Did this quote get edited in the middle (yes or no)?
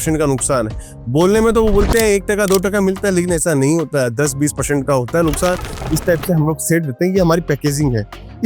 yes